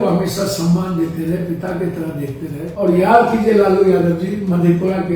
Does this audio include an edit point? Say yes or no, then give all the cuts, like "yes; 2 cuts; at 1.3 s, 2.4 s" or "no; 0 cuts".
yes; 1 cut; at 2.6 s